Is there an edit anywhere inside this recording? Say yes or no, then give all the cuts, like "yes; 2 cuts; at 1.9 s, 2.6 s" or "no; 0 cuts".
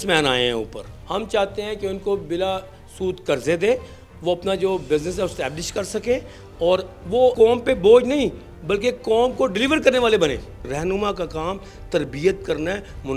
yes; 3 cuts; at 0.9 s, 7.3 s, 10.6 s